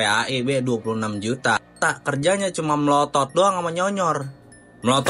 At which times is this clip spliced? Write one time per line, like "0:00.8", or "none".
0:01.8